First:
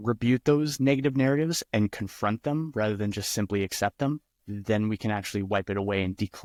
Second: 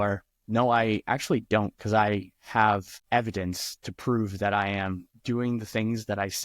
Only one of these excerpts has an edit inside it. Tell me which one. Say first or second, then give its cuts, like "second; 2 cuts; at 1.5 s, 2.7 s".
second; 1 cut; at 2.9 s